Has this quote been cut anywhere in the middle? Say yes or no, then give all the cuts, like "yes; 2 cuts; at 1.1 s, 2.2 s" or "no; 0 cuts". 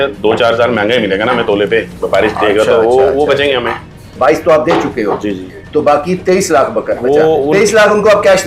yes; 1 cut; at 4.1 s